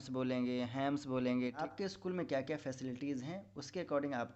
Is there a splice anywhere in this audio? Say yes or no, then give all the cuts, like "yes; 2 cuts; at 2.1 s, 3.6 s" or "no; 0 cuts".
yes; 1 cut; at 1.7 s